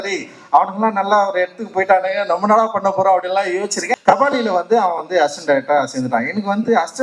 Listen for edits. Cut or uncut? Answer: cut